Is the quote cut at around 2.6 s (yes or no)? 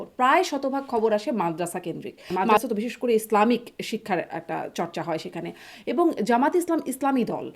yes